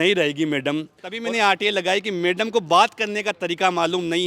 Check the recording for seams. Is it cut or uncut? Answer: cut